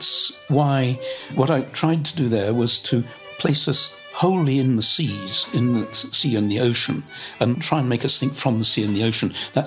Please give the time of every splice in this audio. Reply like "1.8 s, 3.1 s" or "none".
1.3 s, 7.5 s